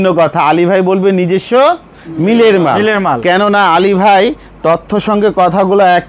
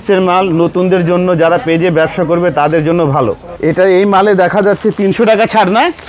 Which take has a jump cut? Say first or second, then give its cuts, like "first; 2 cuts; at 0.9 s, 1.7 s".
second; 1 cut; at 3.5 s